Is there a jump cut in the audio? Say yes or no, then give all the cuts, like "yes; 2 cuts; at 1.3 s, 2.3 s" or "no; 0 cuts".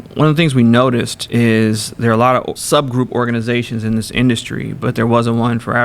yes; 2 cuts; at 1.2 s, 2.6 s